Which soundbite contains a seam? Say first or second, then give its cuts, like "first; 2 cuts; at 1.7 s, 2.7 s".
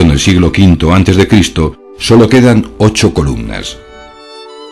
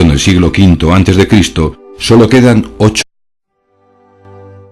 first; 1 cut; at 3.0 s